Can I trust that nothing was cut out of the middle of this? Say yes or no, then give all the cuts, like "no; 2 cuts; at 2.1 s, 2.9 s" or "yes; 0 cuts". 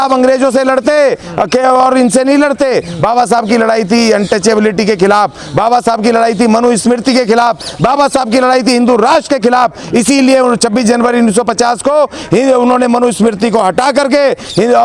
yes; 0 cuts